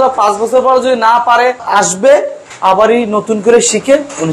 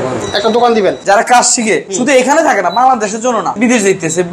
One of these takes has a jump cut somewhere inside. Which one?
second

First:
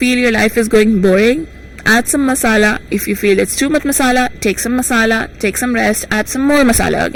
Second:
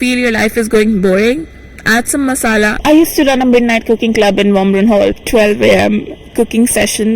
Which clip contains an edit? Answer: second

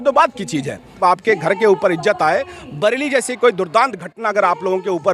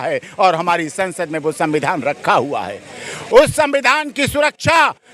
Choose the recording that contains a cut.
first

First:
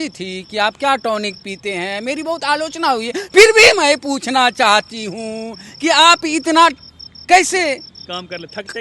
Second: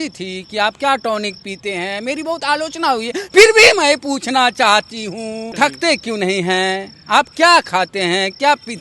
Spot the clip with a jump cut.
second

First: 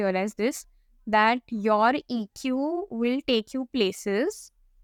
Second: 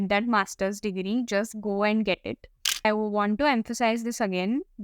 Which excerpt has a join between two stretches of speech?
second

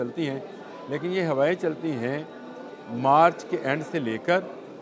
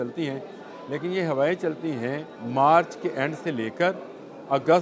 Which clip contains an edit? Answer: second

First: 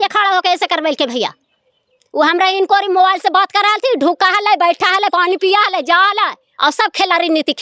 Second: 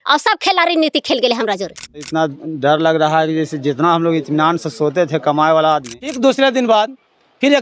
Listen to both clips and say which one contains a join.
second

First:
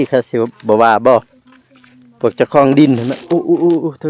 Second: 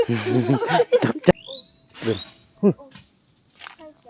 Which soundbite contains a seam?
second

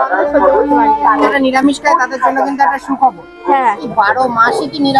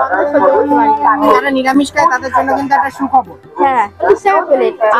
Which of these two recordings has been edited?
first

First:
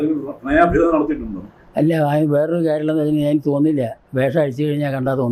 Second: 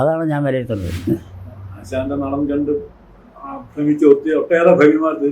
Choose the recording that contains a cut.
second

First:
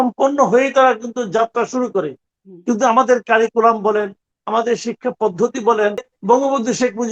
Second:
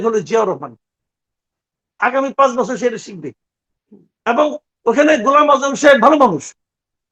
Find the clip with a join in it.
first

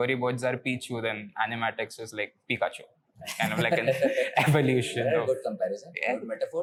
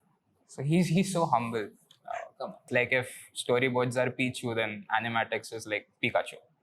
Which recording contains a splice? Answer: second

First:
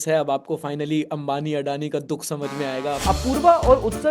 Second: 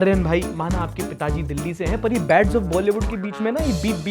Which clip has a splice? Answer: first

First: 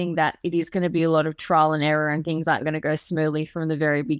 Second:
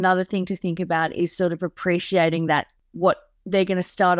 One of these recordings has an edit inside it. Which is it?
second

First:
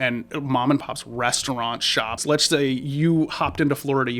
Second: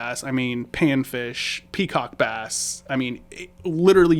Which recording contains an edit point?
first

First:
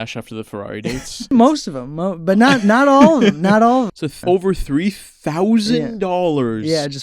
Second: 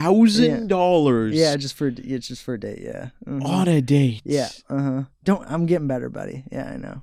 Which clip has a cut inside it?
first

